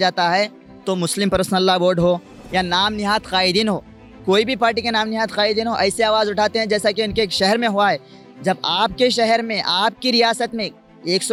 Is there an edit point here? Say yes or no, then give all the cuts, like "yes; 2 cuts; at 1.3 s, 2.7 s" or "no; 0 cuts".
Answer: no; 0 cuts